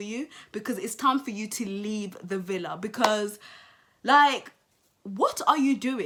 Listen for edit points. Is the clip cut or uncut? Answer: uncut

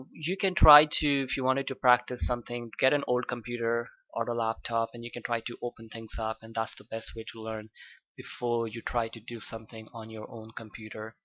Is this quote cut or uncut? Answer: cut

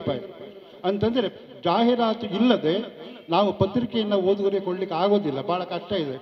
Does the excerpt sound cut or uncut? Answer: cut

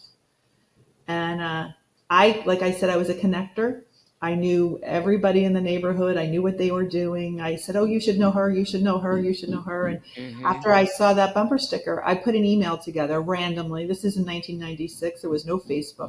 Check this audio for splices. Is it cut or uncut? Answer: uncut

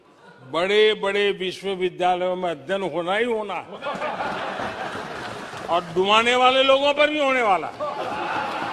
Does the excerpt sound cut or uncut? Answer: uncut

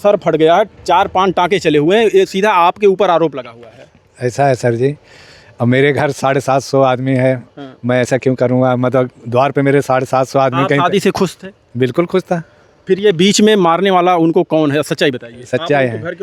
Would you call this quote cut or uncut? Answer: uncut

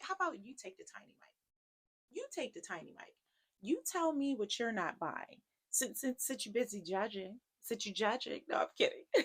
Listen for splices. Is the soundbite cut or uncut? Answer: uncut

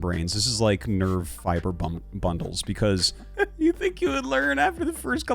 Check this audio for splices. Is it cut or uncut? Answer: cut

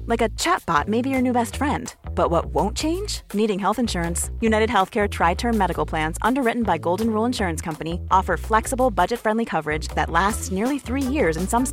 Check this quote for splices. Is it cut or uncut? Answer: uncut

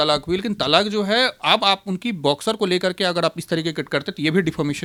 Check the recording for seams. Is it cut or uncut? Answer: uncut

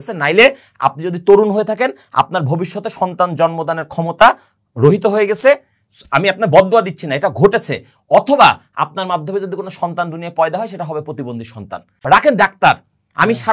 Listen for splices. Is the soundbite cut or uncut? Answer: cut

